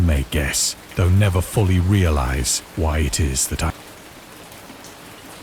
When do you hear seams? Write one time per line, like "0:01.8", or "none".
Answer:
0:03.7